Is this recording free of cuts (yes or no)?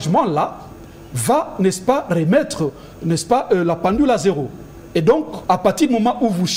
no